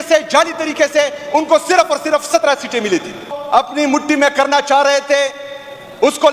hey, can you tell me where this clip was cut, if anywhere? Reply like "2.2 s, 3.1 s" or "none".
3.3 s